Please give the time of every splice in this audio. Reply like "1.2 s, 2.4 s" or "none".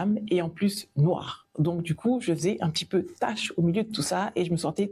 none